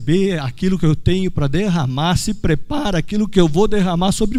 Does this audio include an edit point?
no; 0 cuts

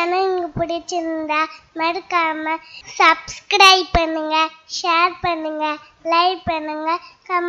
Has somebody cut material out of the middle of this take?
no; 0 cuts

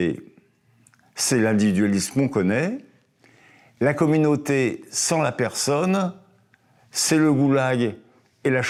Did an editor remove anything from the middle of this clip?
no; 0 cuts

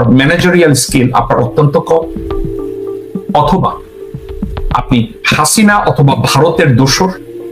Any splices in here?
no; 0 cuts

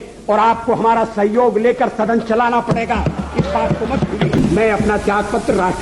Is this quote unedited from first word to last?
no; 1 cut; at 4.4 s

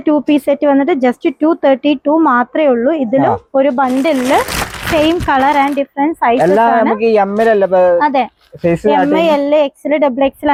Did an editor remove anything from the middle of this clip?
no; 0 cuts

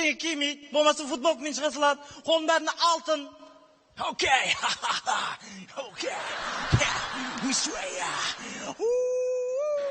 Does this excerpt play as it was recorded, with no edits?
yes; 0 cuts

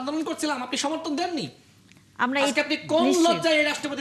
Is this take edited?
no; 0 cuts

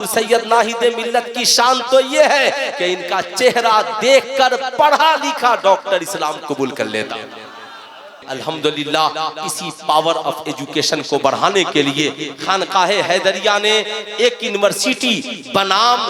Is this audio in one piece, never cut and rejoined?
no; 1 cut; at 8.2 s

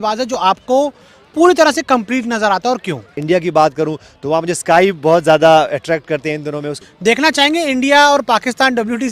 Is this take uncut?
no; 2 cuts; at 3.2 s, 6.8 s

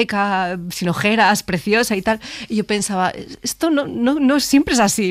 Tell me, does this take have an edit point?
no; 0 cuts

